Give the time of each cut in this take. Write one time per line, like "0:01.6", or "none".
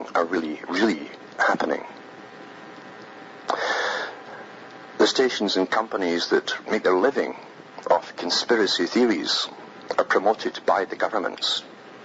0:10.9